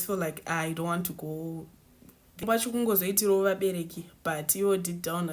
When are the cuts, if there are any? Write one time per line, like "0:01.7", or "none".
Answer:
0:02.4